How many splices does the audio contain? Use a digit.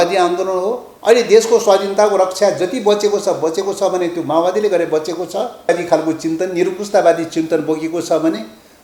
2